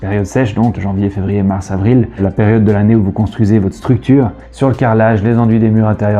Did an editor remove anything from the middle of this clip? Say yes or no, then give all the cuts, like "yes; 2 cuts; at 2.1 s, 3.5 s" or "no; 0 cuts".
yes; 3 cuts; at 0.8 s, 2.2 s, 4.5 s